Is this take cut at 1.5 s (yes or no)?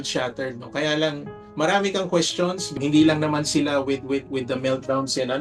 yes